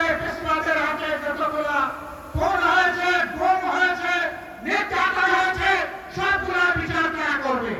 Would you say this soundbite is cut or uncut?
uncut